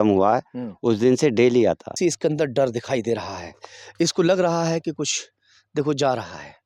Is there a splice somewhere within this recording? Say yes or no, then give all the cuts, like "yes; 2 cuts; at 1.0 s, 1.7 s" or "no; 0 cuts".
yes; 1 cut; at 1.9 s